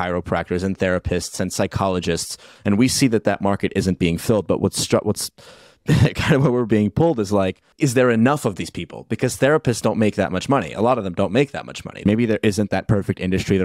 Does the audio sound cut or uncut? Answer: cut